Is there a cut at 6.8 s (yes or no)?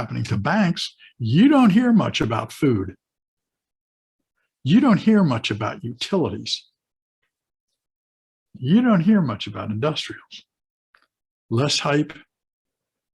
no